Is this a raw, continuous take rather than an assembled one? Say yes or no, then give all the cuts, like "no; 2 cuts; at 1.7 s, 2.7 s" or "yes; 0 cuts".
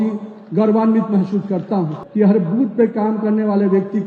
no; 1 cut; at 2.0 s